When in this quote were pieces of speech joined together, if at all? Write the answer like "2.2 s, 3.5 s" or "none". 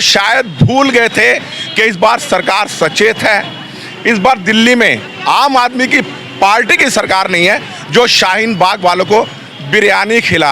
none